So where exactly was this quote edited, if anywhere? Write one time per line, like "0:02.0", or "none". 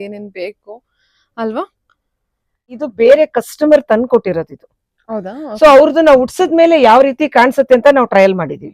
0:02.8